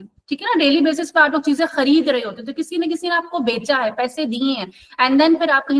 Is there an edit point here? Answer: no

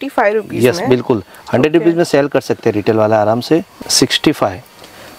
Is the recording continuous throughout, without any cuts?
no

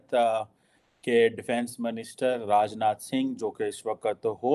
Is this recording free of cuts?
yes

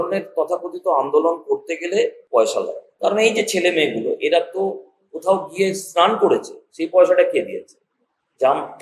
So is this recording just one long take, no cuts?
no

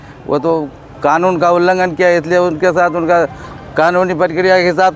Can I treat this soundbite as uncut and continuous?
yes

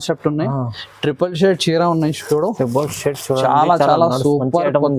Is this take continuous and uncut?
yes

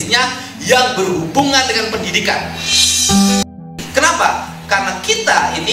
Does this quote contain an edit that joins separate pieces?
yes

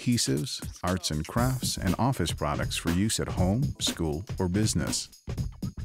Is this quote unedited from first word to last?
no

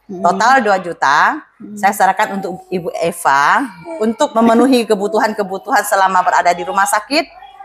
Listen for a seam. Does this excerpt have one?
yes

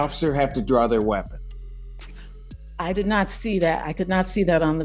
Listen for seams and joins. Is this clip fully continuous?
yes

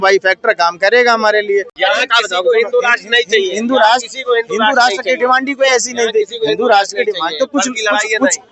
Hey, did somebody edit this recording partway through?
yes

